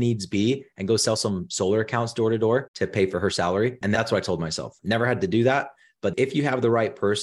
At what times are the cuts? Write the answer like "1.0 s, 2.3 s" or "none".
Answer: 6.1 s